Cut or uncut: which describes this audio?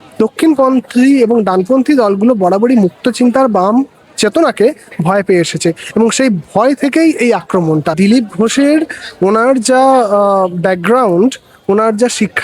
cut